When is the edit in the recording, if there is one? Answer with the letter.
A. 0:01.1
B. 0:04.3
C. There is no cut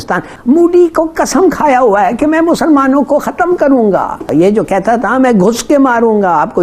B